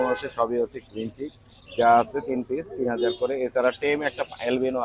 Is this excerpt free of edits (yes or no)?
yes